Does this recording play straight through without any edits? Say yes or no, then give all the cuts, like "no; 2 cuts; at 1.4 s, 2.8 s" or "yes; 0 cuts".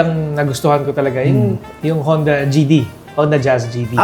no; 1 cut; at 1.7 s